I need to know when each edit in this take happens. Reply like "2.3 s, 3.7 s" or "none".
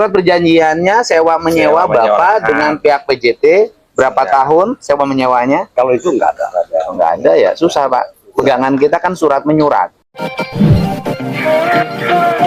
10.1 s